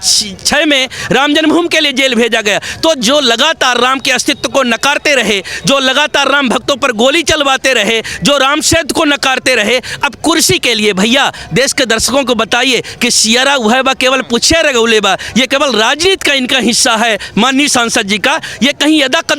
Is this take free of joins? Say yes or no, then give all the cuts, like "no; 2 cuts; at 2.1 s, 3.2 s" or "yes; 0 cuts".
yes; 0 cuts